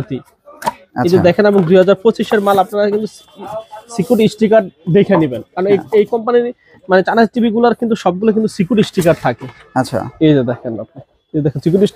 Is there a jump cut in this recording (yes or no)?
no